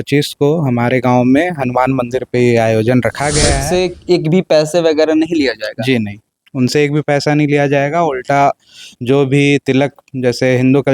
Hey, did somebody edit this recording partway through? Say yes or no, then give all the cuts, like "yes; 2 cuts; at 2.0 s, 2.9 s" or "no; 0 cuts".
yes; 1 cut; at 3.6 s